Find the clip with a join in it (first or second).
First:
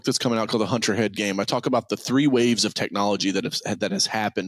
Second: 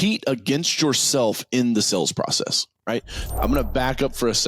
second